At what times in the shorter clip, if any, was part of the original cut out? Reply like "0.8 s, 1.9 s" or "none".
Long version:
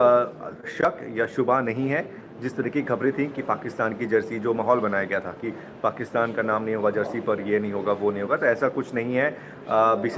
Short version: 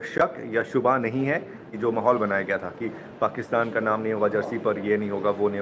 1.7 s